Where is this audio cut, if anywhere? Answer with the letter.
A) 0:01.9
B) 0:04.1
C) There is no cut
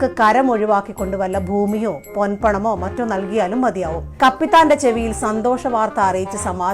B